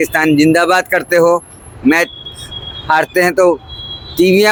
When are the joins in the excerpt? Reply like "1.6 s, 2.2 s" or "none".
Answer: none